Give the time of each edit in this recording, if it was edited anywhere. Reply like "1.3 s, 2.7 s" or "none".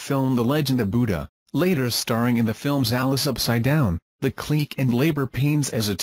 1.1 s